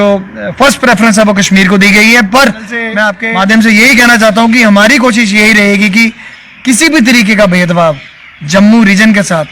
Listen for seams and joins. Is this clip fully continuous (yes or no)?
no